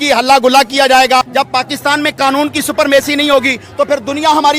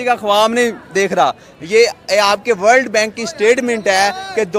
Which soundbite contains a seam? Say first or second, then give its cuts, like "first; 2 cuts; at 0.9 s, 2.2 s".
first; 1 cut; at 1.3 s